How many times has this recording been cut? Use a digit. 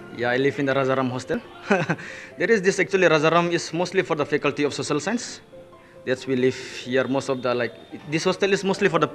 0